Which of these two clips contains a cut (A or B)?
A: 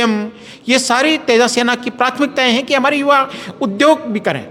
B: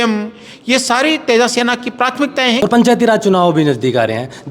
B